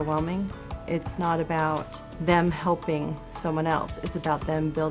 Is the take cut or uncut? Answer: uncut